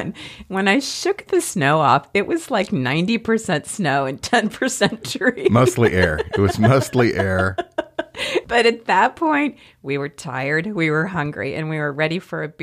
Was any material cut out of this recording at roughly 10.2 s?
no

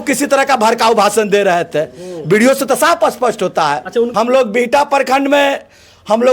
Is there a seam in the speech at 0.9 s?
no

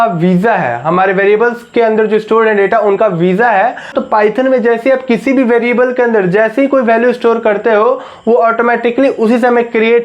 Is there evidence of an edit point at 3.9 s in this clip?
yes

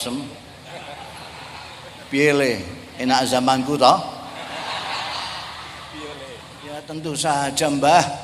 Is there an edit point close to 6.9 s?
yes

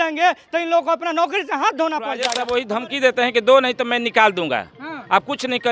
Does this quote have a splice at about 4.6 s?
no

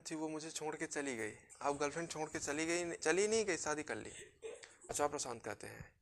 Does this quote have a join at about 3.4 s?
no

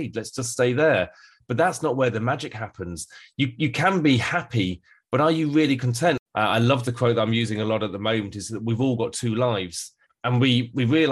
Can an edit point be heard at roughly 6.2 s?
yes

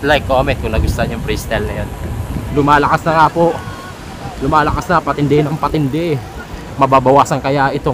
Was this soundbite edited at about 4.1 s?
no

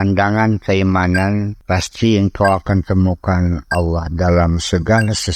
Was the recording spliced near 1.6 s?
yes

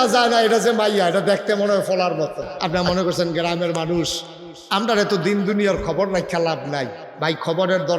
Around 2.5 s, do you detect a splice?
yes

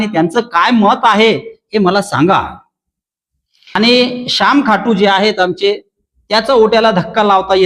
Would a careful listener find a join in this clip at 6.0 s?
no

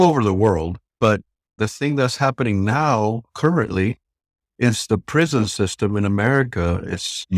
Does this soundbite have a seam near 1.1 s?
yes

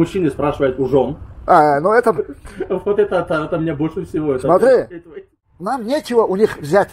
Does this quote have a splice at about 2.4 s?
no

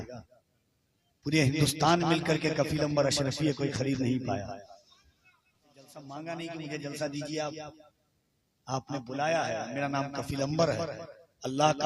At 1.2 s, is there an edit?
no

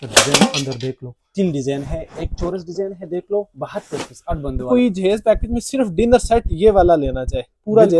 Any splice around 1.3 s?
yes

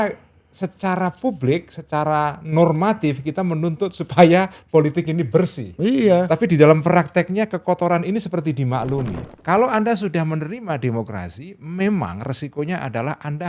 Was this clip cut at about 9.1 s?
yes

